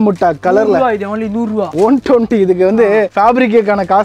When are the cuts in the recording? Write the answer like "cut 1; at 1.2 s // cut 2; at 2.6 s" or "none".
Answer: cut 1; at 1.7 s